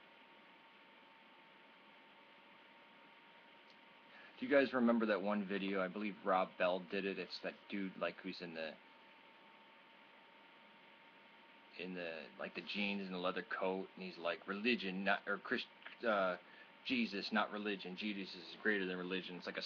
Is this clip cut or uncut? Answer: cut